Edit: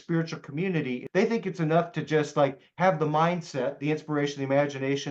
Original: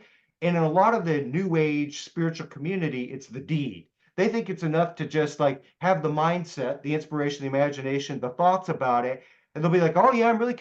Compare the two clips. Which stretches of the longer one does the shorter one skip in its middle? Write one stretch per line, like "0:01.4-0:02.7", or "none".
0:03.1-0:04.1